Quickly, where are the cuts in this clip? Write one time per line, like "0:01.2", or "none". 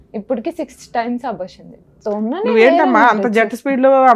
0:02.0